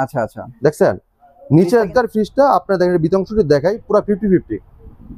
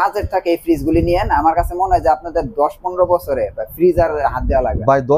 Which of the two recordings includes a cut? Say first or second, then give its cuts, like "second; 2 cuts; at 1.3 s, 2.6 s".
first; 1 cut; at 1.9 s